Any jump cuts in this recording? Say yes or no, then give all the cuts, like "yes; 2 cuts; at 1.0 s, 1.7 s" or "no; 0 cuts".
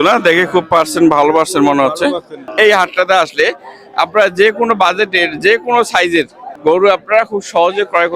yes; 2 cuts; at 2.5 s, 6.4 s